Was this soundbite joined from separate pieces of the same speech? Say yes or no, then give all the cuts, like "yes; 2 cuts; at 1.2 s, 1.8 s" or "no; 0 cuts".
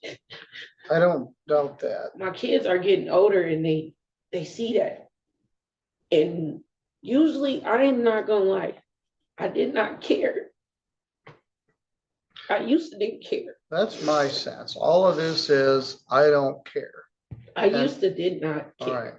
no; 0 cuts